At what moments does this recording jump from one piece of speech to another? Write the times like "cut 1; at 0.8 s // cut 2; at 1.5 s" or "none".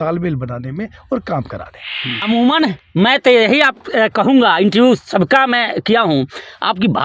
cut 1; at 2.2 s